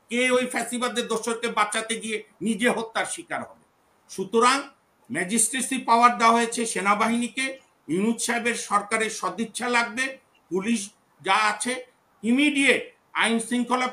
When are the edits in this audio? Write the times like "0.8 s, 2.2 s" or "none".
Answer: none

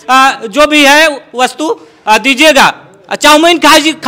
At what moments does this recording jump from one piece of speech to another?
none

